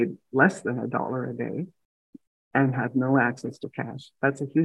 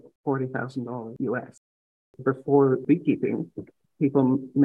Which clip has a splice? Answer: second; 3 cuts; at 1.1 s, 2.1 s, 2.8 s

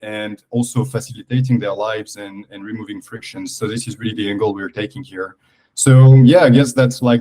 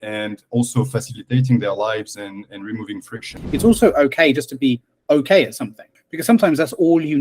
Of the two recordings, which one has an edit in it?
second; 2 cuts; at 3.3 s, 6.0 s

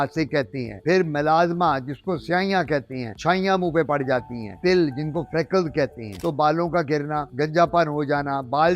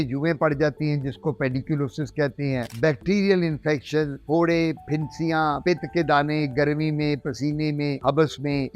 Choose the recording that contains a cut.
first; 2 cuts; at 4.5 s, 6.2 s

